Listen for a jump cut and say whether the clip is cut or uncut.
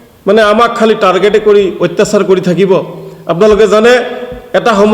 uncut